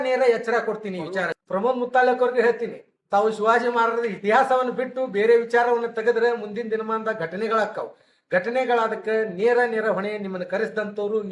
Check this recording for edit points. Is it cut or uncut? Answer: cut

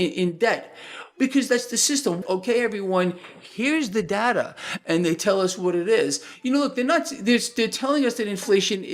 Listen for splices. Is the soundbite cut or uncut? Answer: cut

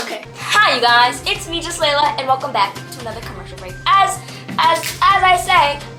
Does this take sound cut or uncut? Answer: uncut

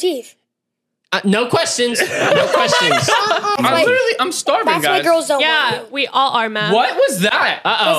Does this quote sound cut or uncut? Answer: cut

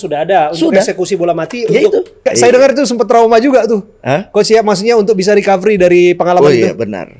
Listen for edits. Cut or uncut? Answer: cut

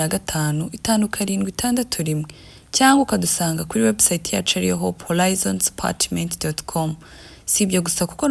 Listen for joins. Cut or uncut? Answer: uncut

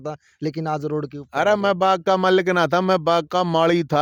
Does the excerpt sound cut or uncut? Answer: uncut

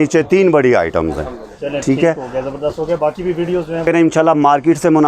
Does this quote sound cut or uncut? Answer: cut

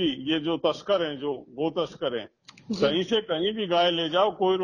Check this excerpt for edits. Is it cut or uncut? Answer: uncut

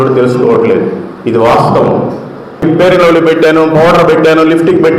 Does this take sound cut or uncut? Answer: cut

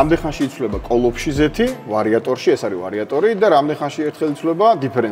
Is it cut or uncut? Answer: uncut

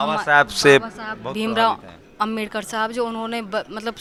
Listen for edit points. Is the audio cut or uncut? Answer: uncut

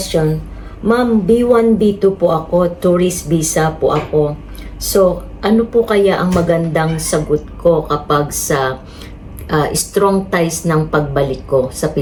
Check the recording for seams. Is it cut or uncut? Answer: uncut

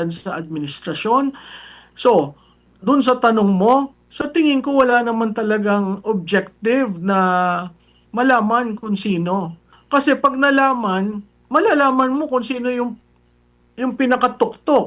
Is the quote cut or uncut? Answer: cut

